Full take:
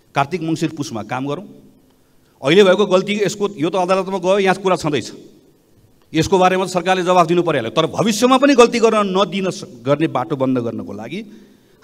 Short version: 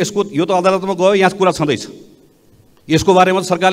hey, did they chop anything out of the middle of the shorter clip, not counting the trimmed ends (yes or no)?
no